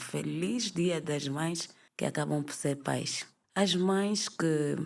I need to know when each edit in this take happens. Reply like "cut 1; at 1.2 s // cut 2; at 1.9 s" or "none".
cut 1; at 3.4 s